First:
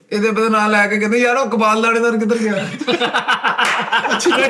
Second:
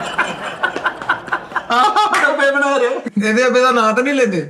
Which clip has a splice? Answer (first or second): second